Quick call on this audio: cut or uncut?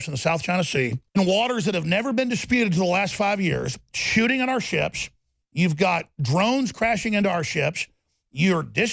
cut